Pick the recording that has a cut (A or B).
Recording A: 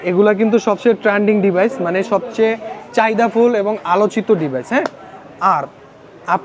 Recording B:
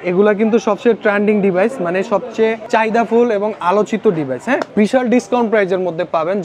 B